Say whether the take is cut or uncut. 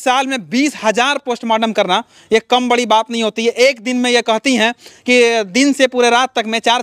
uncut